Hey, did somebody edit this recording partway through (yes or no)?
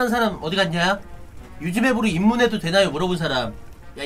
no